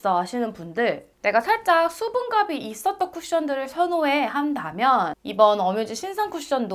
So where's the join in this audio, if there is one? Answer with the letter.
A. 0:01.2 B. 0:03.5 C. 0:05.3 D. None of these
D